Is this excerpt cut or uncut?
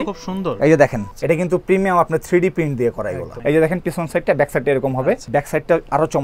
cut